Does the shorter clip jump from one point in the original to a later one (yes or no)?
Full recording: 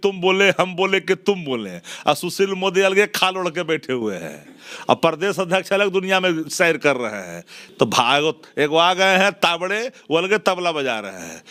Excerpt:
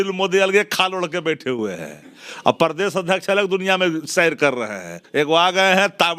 yes